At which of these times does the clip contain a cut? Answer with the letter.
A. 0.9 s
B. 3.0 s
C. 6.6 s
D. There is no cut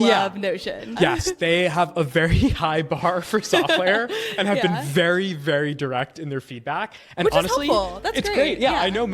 A